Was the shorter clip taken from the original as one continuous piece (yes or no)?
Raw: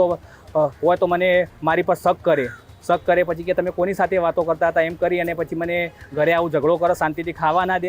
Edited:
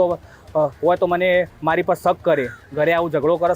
no